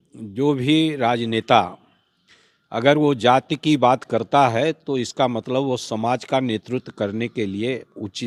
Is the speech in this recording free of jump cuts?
yes; 0 cuts

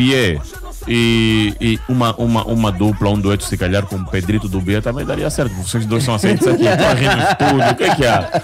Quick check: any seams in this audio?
no; 0 cuts

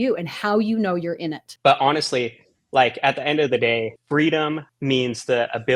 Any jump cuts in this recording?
yes; 3 cuts; at 1.4 s, 4.0 s, 4.7 s

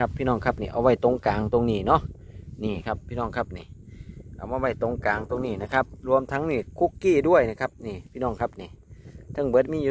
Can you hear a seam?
no; 0 cuts

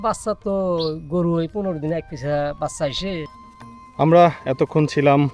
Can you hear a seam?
yes; 1 cut; at 3.3 s

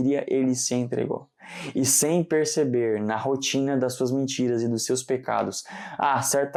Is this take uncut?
yes; 0 cuts

